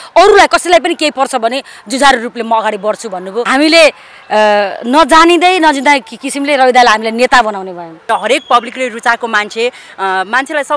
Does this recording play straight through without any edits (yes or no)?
no